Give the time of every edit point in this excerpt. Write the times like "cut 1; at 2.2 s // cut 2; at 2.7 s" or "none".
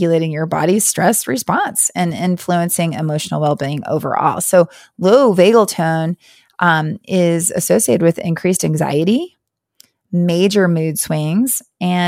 none